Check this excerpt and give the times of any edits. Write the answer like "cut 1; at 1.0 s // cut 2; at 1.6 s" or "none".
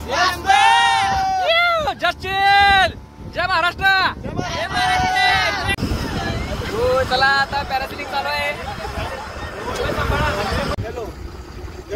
cut 1; at 5.8 s // cut 2; at 10.8 s